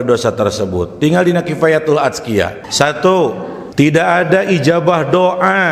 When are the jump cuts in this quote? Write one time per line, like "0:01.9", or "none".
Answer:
0:02.6
0:03.6

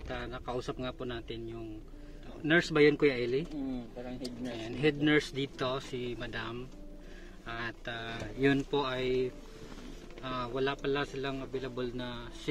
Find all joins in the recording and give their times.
0:02.3

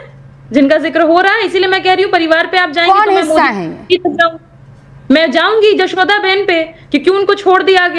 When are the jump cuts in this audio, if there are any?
none

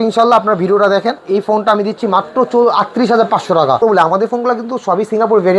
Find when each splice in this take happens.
0:01.2
0:03.8

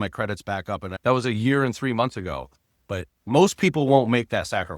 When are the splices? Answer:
0:00.9

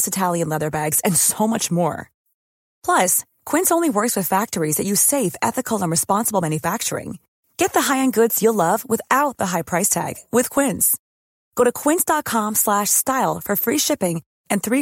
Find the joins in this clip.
none

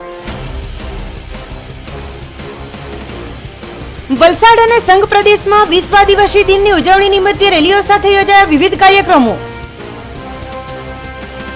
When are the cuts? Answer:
0:03.9

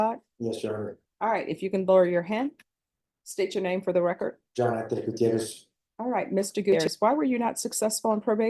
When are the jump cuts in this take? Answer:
0:06.8

